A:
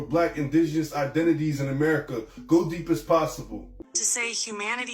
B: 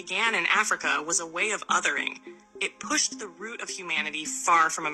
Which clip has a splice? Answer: A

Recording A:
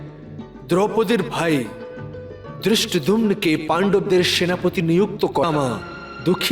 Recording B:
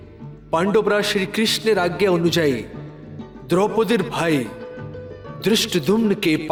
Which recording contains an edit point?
A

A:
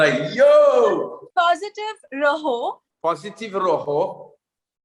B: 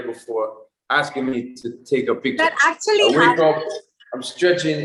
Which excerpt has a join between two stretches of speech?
A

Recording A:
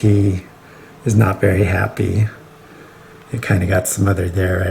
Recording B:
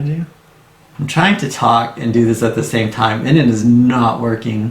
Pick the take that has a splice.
B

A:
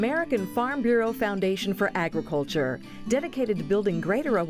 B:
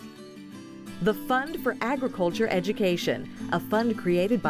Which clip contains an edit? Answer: B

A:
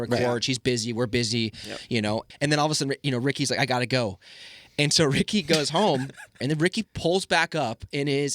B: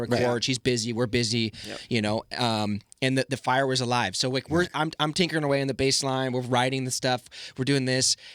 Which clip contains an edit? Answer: A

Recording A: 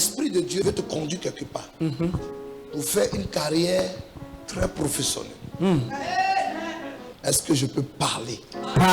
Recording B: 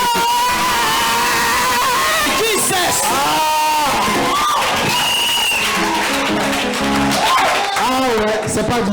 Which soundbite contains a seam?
B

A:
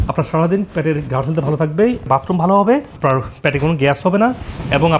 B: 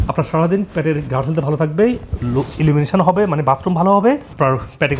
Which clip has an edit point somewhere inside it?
A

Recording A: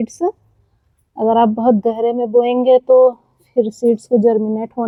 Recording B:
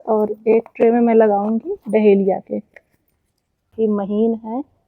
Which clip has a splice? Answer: B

